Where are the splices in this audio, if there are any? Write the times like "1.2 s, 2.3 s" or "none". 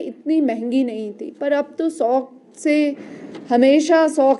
none